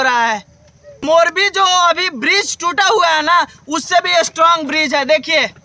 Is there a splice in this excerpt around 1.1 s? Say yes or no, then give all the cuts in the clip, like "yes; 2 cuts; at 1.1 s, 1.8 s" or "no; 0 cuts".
yes; 1 cut; at 1.1 s